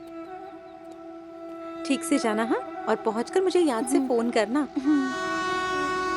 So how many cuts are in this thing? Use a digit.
1